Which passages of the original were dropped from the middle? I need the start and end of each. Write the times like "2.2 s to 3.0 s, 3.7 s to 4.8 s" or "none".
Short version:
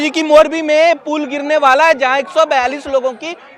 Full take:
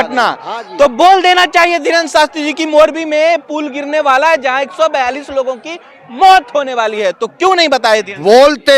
none